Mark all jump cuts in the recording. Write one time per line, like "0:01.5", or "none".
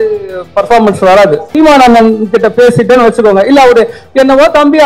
0:01.5